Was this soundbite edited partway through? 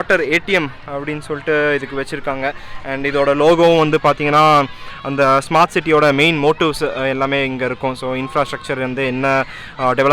no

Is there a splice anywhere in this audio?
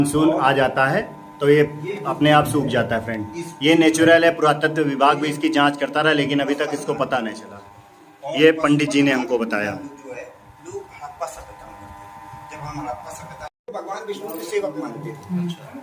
yes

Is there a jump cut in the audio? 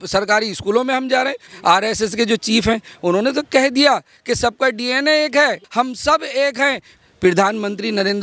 yes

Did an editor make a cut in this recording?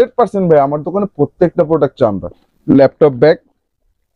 yes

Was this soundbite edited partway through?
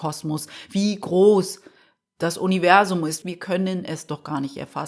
yes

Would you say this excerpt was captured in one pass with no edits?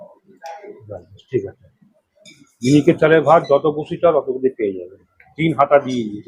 yes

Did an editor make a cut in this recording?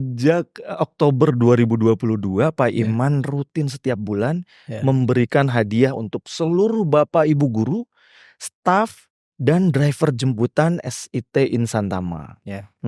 no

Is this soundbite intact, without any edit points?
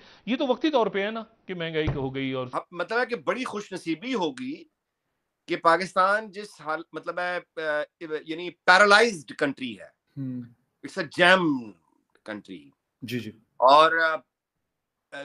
no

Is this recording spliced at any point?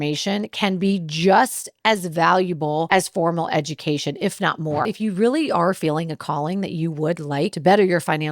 yes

